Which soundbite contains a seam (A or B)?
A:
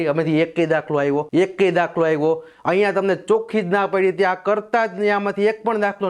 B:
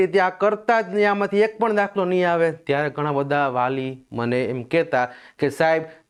A